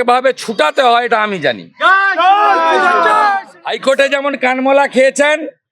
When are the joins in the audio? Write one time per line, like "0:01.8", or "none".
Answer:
0:03.4